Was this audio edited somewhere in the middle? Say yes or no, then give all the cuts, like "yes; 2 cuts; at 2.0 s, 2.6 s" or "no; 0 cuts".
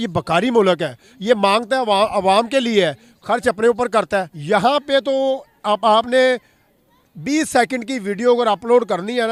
no; 0 cuts